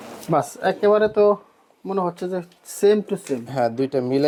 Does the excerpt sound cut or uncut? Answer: uncut